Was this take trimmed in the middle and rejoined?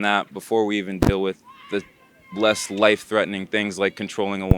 no; 0 cuts

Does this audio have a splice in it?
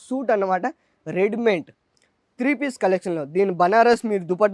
no; 0 cuts

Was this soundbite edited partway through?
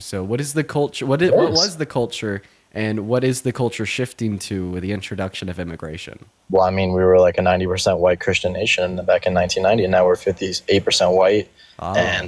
no; 0 cuts

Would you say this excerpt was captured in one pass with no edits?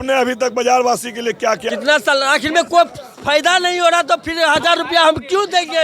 no; 1 cut; at 1.6 s

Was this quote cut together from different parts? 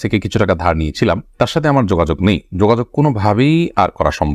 no; 0 cuts

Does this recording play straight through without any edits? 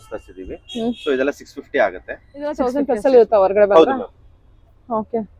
no; 1 cut; at 2.6 s

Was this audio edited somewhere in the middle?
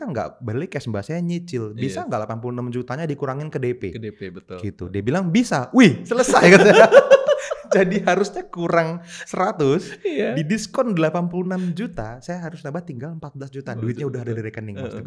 no; 0 cuts

